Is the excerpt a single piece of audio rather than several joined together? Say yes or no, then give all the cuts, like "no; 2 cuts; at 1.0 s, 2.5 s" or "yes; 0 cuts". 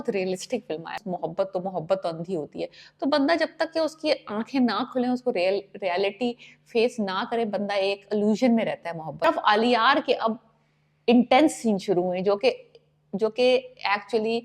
no; 2 cuts; at 1.0 s, 9.3 s